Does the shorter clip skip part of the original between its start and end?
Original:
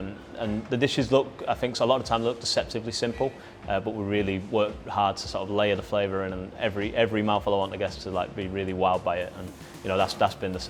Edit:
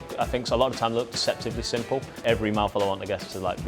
yes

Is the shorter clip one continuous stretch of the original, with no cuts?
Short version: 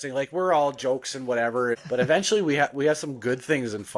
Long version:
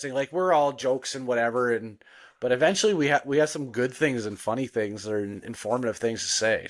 no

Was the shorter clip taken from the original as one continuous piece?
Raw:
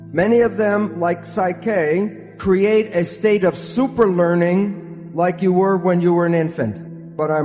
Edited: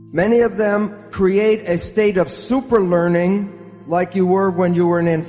no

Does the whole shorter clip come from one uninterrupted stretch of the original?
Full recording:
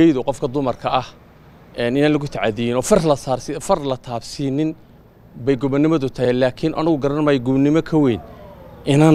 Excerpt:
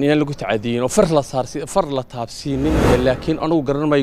no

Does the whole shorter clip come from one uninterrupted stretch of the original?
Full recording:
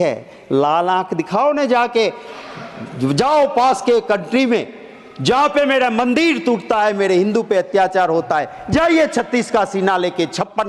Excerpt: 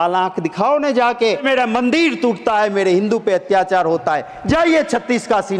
no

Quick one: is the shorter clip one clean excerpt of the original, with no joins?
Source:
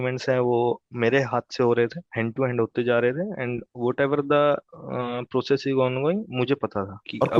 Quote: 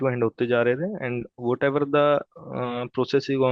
yes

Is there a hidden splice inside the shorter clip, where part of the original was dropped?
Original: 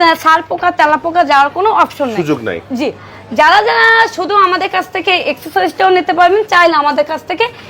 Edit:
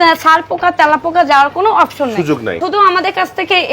yes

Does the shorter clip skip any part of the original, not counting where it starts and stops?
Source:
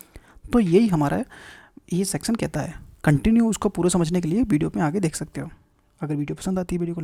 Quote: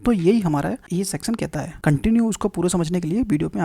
yes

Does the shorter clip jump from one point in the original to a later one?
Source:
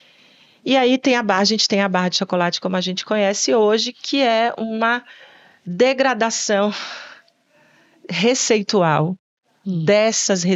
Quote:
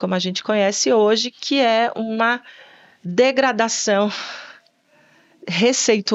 no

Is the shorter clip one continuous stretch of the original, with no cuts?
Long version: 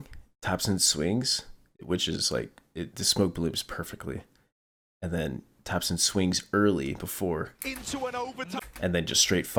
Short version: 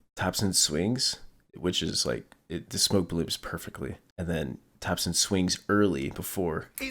no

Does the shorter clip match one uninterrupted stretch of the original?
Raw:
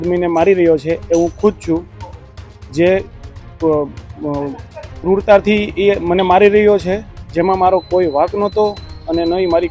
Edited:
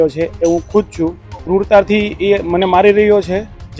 no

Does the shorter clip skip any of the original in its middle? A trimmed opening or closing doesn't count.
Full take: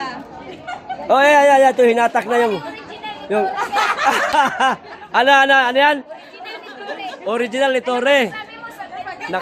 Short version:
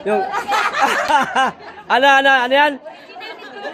no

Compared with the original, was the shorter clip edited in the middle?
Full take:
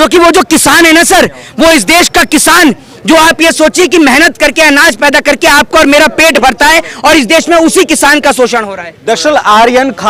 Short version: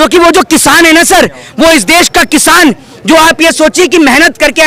no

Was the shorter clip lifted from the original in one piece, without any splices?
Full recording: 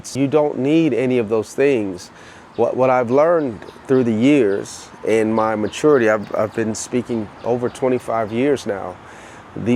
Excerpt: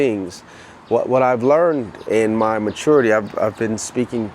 no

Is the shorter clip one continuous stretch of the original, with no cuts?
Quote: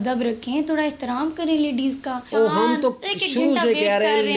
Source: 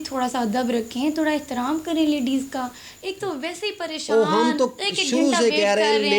no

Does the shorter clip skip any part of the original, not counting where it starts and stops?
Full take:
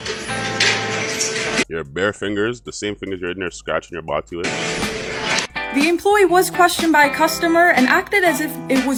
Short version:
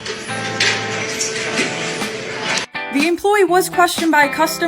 yes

